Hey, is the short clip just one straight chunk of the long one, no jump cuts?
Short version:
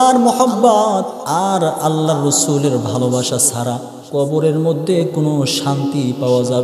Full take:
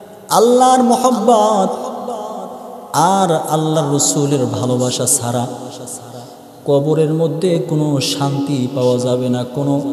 no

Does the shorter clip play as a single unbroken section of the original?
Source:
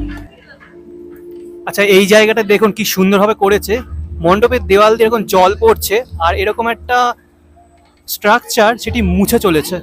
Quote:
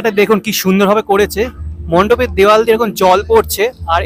yes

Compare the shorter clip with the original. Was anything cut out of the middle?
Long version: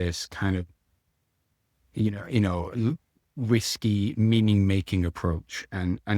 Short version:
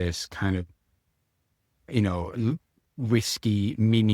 yes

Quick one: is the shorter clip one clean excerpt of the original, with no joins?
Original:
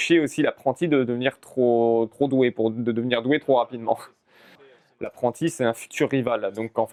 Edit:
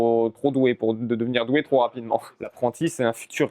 no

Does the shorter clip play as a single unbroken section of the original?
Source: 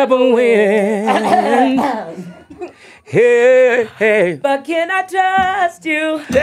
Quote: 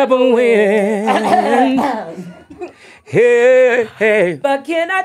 yes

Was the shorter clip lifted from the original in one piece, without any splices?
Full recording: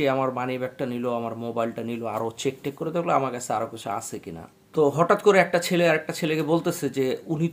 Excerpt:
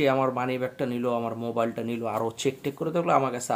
yes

